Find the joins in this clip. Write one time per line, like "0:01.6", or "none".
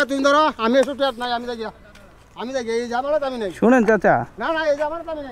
none